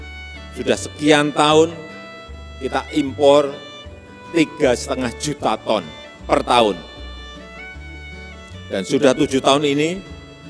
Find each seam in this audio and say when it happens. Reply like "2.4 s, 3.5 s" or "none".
none

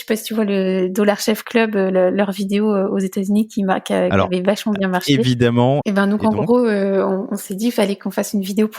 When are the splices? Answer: 5.8 s

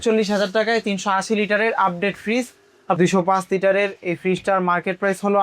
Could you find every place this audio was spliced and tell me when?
3.0 s

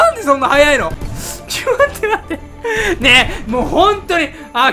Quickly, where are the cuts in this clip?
1.0 s

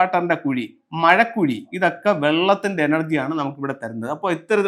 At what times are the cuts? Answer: 1.7 s

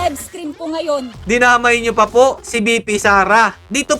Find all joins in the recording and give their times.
1.1 s

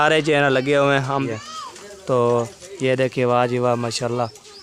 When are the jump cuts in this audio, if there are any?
1.3 s

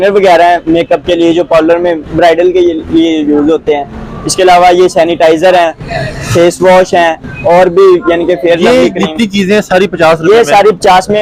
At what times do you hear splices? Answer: none

